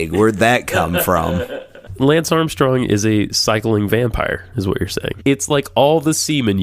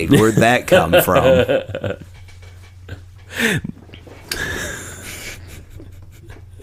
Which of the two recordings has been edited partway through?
first; 2 cuts; at 1.9 s, 5.1 s

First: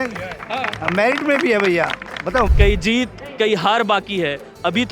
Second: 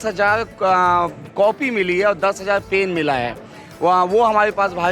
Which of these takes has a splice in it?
first; 1 cut; at 2.5 s

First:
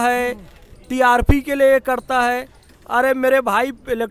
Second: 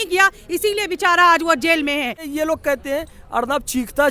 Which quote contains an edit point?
second; 1 cut; at 2.3 s

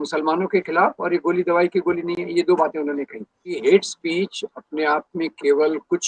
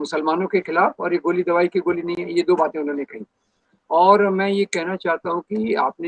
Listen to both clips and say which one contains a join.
first; 1 cut; at 3.6 s

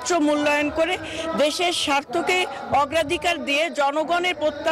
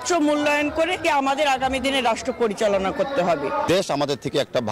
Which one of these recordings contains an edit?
second; 2 cuts; at 1.0 s, 3.7 s

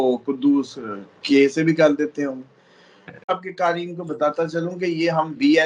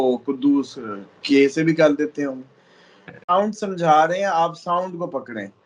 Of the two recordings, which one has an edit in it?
first; 1 cut; at 3.3 s

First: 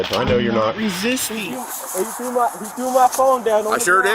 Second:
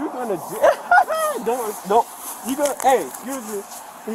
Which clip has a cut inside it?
first; 1 cut; at 1.3 s

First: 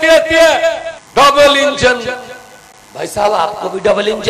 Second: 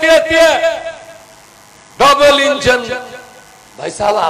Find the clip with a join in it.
first; 1 cut; at 0.9 s

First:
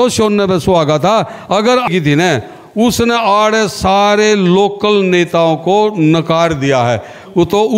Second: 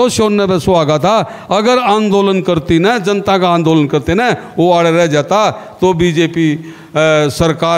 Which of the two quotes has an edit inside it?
first; 1 cut; at 1.9 s

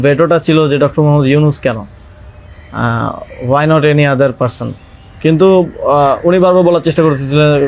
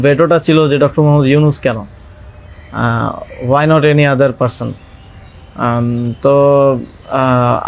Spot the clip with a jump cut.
first; 1 cut; at 5.0 s

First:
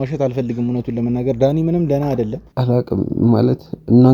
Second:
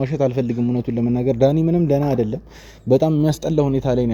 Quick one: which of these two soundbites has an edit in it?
first; 1 cut; at 2.5 s

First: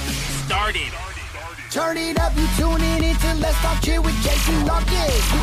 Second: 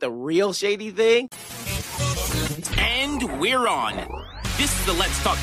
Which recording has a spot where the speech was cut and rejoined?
second; 1 cut; at 1.4 s

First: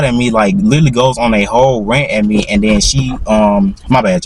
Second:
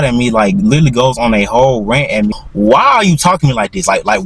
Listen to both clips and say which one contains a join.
second; 1 cut; at 2.3 s

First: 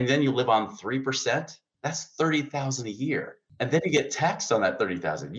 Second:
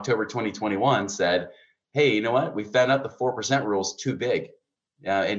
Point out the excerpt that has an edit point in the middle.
first; 2 cuts; at 1.6 s, 3.4 s

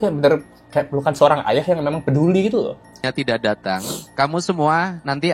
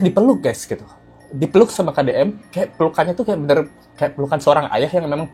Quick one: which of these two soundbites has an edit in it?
first; 1 cut; at 3.0 s

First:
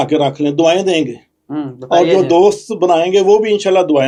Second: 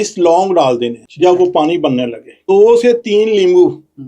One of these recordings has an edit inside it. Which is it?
second; 2 cuts; at 1.0 s, 2.4 s

